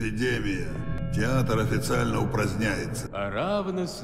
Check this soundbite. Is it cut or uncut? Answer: cut